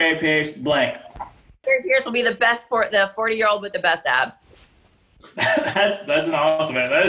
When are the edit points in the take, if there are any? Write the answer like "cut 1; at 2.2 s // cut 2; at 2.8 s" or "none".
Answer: cut 1; at 1.6 s